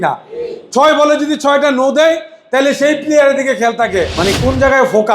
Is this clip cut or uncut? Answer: cut